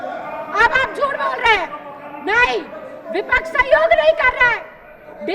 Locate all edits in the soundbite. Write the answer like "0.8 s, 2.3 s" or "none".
none